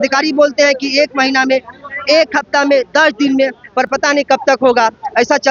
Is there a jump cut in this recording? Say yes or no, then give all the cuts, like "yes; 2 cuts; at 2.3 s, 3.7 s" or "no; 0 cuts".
no; 0 cuts